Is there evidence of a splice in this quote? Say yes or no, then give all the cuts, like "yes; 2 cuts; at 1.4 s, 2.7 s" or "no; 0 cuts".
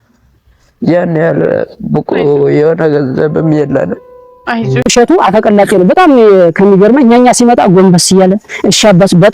yes; 1 cut; at 4.8 s